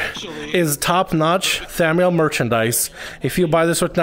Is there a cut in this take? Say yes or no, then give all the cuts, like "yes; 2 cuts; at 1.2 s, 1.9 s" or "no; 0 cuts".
no; 0 cuts